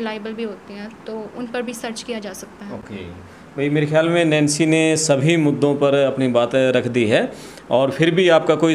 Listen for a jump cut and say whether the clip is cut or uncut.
uncut